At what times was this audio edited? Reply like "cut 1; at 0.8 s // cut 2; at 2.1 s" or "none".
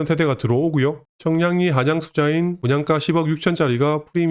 cut 1; at 1.1 s // cut 2; at 2.6 s